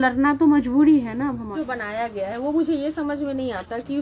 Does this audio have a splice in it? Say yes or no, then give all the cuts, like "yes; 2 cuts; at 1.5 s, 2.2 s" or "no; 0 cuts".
yes; 1 cut; at 1.5 s